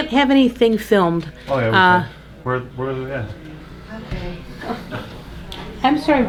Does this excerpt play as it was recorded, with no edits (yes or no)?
yes